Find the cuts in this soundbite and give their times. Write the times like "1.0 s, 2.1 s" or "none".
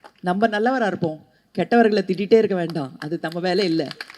none